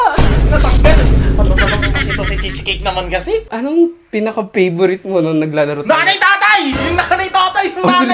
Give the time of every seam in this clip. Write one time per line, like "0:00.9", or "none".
0:03.5